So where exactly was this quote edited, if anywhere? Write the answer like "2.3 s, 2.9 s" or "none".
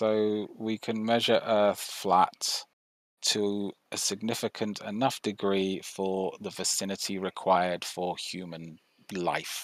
none